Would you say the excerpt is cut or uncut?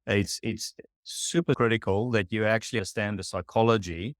cut